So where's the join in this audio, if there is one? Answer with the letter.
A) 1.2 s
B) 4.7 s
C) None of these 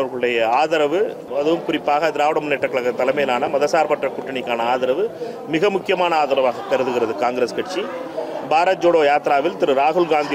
A